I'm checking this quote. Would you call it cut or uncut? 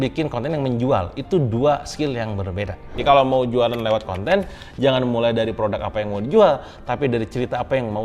cut